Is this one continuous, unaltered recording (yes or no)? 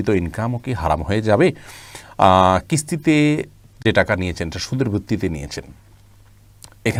yes